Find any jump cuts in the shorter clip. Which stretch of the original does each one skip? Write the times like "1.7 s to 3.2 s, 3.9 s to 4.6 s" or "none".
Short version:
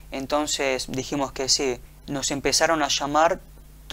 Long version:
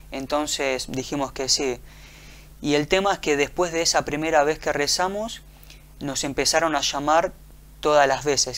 1.9 s to 5.9 s